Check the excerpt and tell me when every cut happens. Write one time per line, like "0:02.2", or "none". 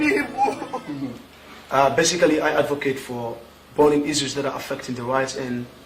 0:00.9